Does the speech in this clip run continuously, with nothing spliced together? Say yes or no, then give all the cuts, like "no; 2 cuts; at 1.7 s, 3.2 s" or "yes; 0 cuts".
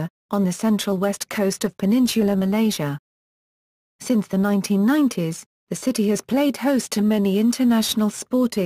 no; 1 cut; at 7.2 s